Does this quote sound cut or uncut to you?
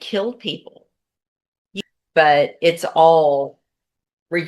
cut